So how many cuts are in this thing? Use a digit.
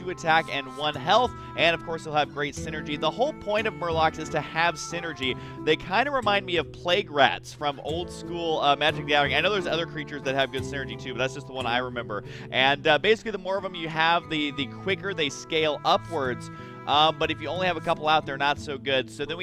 0